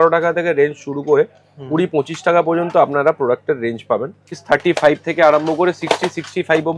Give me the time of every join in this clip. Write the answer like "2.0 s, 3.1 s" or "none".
4.4 s